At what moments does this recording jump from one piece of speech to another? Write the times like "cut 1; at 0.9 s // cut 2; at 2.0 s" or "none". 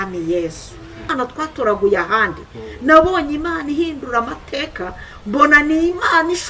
cut 1; at 1.1 s